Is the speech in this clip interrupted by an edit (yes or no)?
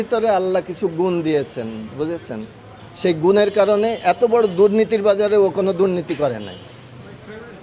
no